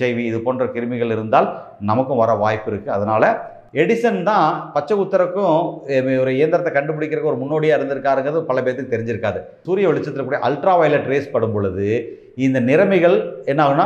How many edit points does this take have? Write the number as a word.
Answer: two